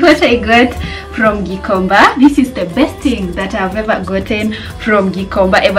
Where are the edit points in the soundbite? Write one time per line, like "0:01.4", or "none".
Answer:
none